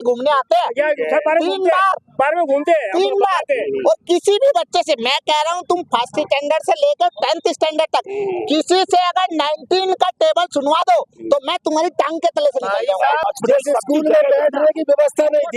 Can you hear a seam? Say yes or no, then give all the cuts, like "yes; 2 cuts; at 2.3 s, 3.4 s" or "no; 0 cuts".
yes; 1 cut; at 13.2 s